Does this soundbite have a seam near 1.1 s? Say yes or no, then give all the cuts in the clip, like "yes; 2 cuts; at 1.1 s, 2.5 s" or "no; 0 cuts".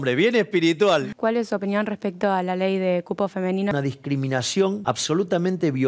yes; 3 cuts; at 1.1 s, 3.7 s, 4.8 s